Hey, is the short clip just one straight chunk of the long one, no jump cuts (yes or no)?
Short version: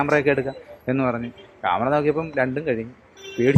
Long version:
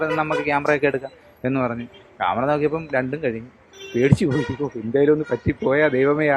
yes